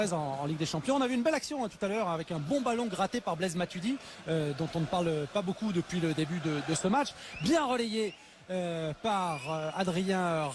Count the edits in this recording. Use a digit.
1